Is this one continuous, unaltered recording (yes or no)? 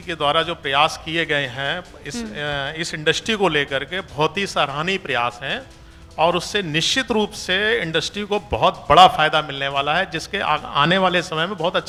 yes